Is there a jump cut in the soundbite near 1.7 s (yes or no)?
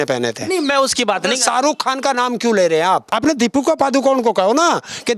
no